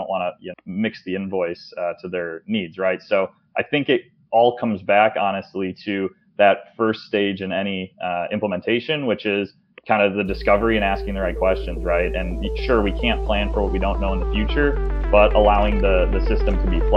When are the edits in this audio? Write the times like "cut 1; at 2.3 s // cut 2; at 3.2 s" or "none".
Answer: none